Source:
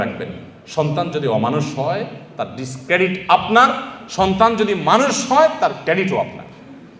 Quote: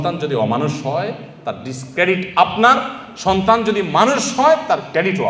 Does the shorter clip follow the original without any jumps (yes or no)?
yes